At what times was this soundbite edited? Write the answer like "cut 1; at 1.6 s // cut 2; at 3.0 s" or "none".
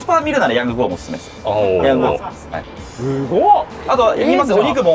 none